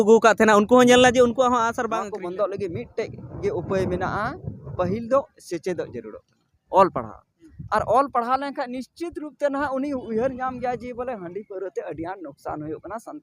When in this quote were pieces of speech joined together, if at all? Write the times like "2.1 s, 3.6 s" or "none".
1.7 s